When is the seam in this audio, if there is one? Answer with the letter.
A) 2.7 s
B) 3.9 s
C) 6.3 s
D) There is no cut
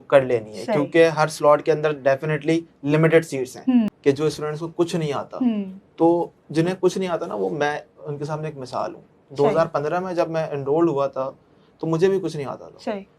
B